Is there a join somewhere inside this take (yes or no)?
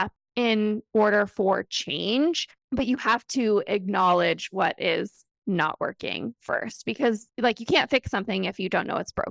yes